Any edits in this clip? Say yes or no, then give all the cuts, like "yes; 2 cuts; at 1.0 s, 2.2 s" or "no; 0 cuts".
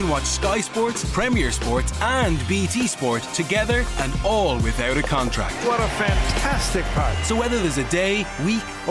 no; 0 cuts